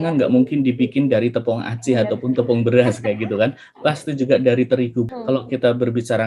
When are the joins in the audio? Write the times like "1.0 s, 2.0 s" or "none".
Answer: 5.1 s